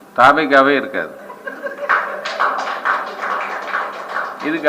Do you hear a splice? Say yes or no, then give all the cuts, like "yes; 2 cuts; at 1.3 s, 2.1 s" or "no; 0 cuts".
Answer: yes; 1 cut; at 1.3 s